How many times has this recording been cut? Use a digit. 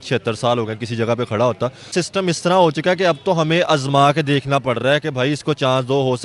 1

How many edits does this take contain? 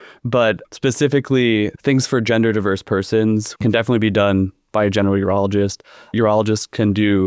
3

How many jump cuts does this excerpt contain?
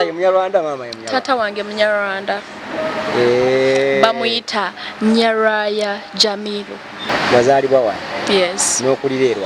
1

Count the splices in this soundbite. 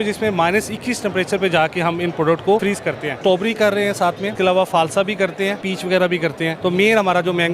4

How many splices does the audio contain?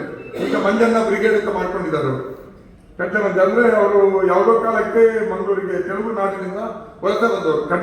0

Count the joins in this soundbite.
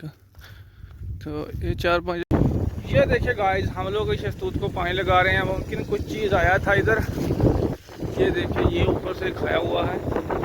1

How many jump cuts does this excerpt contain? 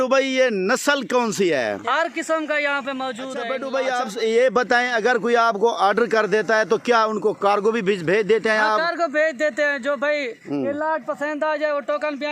2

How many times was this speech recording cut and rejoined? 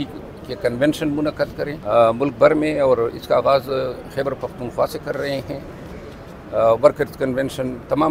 1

